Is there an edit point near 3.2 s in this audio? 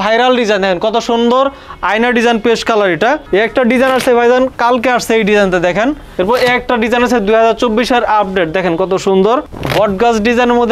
yes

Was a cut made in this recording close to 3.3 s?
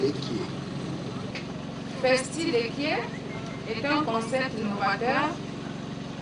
no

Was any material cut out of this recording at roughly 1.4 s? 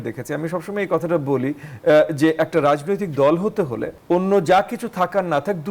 no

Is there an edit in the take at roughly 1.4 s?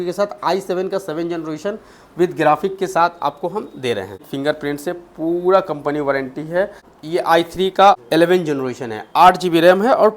no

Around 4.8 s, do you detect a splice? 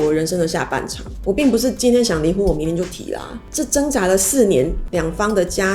yes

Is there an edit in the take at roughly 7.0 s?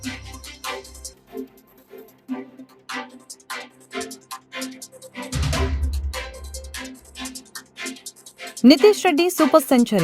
no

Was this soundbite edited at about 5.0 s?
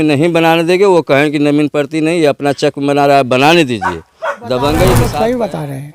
yes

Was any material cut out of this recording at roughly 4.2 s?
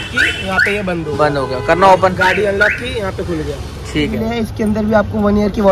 yes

